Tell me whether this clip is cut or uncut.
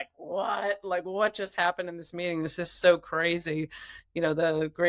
uncut